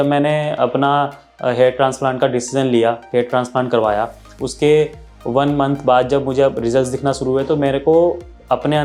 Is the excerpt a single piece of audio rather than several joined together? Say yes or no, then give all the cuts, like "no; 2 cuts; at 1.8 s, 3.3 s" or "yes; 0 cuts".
yes; 0 cuts